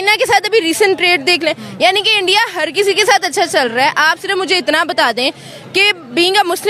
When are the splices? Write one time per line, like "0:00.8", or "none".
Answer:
none